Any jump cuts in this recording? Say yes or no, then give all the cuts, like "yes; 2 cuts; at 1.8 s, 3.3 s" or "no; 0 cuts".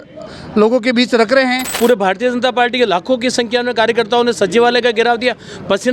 yes; 1 cut; at 1.7 s